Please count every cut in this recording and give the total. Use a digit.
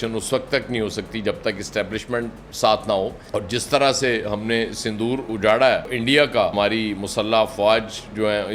2